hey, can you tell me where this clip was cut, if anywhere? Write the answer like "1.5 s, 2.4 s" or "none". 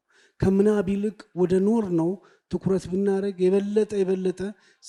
none